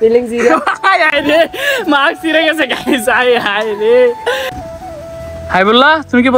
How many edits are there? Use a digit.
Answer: 1